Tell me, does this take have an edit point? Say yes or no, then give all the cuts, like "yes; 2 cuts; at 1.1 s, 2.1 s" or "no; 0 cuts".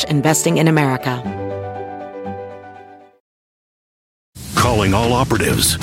yes; 1 cut; at 1.2 s